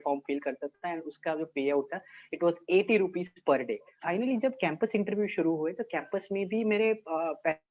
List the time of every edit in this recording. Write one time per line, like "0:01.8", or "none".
0:03.9